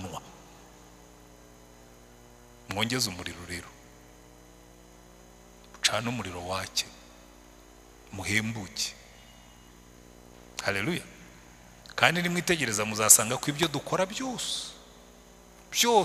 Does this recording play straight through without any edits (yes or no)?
yes